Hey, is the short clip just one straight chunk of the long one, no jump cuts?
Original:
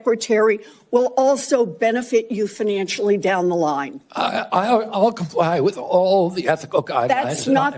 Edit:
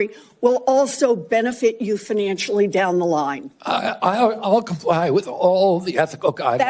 yes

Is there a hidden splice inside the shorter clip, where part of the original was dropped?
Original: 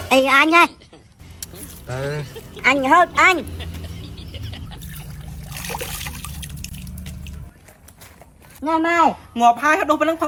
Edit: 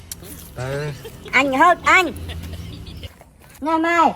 yes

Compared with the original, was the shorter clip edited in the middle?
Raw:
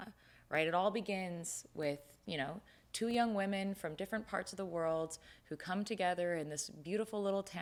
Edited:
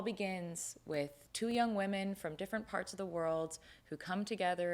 yes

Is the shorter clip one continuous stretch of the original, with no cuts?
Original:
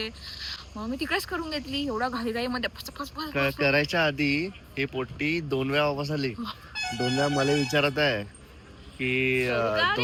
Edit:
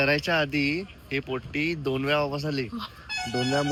yes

